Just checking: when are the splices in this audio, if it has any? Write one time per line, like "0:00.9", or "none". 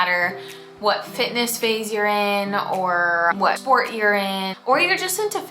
0:03.4
0:04.5